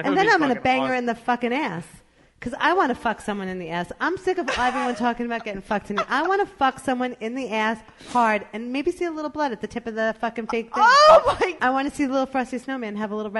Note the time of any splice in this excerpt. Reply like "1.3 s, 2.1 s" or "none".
11.6 s